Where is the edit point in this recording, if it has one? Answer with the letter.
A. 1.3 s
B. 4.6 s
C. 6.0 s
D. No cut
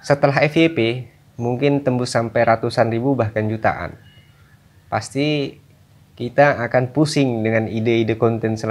D